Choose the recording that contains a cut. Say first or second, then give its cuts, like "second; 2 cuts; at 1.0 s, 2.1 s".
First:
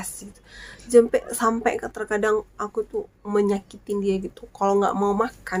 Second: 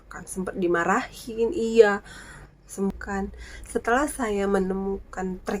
second; 1 cut; at 3.3 s